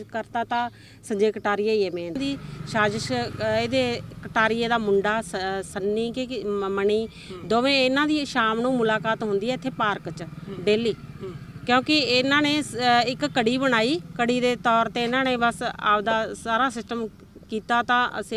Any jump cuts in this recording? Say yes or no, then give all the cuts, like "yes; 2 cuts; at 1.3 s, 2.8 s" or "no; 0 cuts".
yes; 1 cut; at 2.2 s